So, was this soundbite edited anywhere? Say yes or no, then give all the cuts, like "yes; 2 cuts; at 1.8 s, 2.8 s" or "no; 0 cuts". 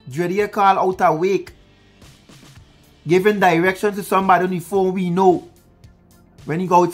no; 0 cuts